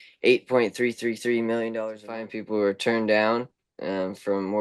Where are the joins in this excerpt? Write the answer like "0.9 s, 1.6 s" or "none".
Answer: 2.3 s